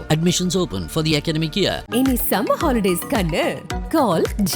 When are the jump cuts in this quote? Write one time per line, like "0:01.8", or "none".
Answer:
none